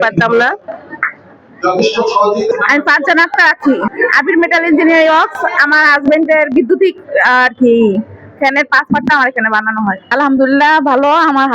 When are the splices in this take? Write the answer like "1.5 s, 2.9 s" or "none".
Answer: none

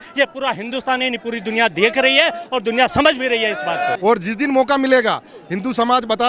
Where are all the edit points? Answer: 3.9 s

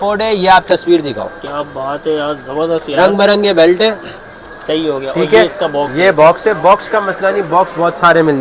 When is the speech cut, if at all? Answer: none

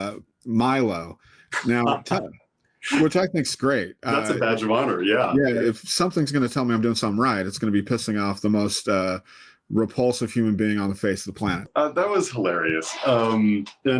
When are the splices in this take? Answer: 11.6 s

